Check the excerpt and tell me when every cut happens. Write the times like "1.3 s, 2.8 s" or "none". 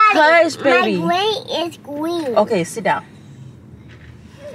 none